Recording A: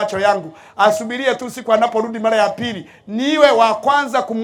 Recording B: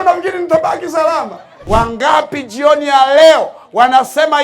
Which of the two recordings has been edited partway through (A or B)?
B